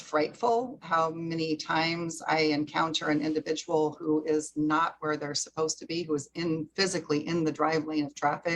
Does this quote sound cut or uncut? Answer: uncut